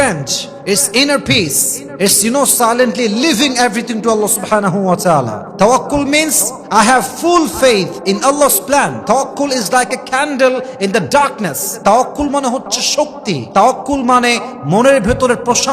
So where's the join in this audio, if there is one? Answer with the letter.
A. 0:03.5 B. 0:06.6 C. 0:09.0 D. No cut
C